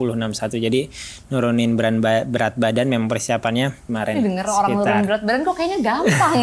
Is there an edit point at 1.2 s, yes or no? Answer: no